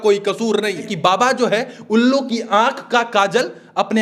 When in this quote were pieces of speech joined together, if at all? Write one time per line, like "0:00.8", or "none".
0:01.0